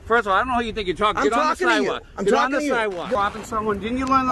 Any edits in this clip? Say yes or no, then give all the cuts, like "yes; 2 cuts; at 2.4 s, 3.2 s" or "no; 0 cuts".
yes; 1 cut; at 3.1 s